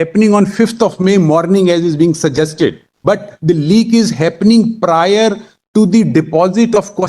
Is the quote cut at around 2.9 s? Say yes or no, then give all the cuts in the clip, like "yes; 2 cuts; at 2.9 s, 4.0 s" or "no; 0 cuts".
yes; 1 cut; at 2.9 s